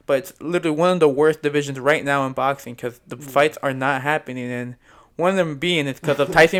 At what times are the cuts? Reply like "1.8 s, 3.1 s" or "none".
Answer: none